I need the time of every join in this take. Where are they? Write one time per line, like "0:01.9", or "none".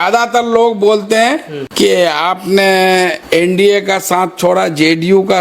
0:01.6
0:03.2